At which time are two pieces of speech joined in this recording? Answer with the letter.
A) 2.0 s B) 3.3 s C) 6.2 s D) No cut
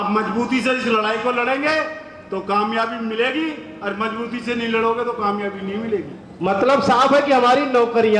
C